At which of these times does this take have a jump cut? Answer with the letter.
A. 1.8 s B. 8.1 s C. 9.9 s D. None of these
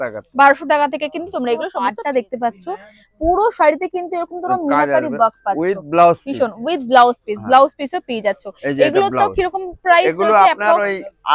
A